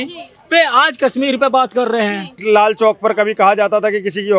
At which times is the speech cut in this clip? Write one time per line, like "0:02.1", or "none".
0:02.4